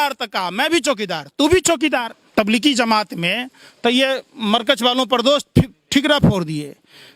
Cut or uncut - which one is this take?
cut